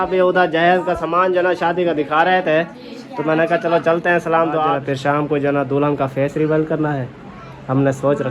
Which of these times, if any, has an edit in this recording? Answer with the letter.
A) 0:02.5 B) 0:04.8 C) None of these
B